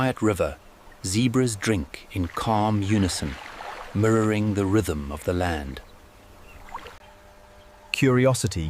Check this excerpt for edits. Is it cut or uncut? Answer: cut